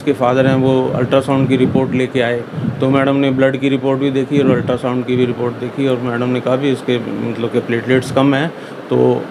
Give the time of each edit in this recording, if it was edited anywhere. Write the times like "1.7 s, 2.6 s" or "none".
none